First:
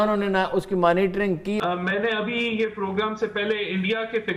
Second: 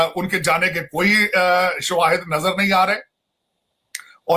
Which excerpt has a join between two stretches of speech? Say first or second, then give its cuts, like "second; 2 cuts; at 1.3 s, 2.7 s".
first; 1 cut; at 1.6 s